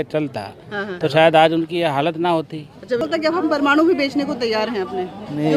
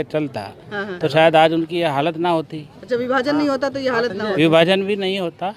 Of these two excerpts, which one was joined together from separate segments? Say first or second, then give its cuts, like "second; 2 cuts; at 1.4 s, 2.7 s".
first; 1 cut; at 3.0 s